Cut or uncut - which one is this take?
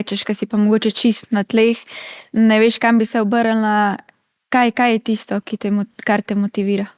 uncut